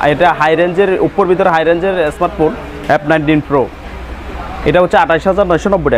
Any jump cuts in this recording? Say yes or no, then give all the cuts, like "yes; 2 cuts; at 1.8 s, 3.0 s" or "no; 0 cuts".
no; 0 cuts